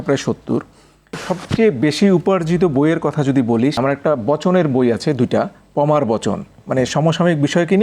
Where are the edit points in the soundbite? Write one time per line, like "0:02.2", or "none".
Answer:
0:01.2
0:03.8